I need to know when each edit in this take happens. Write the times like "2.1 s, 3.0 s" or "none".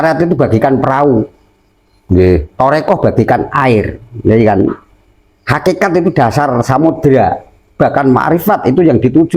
none